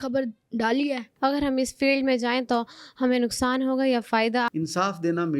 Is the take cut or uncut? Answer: cut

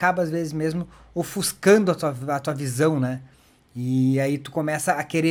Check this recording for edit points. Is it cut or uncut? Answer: uncut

